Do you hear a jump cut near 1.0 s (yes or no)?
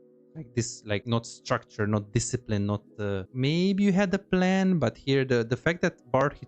yes